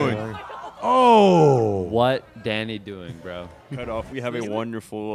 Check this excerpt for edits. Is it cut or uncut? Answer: cut